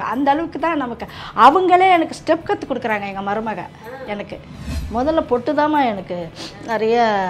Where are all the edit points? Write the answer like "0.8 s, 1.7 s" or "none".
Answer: 4.8 s